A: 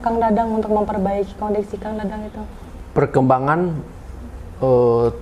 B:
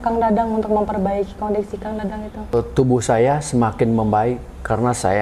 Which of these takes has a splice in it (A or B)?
B